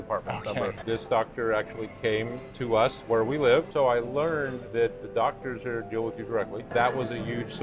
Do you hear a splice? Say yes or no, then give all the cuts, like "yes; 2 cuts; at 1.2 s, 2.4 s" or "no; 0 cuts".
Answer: yes; 5 cuts; at 0.8 s, 3.0 s, 3.7 s, 4.6 s, 6.7 s